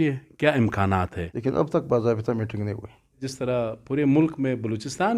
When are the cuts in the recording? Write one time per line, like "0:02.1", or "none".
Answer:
0:01.2
0:03.3